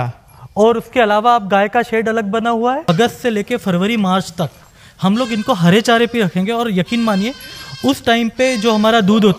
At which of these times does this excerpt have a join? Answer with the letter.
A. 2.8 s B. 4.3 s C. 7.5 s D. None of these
A